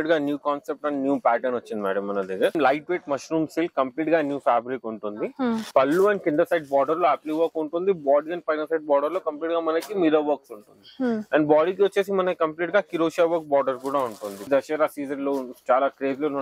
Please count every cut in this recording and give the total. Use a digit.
3